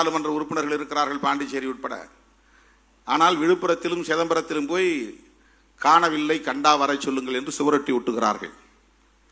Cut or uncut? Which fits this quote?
uncut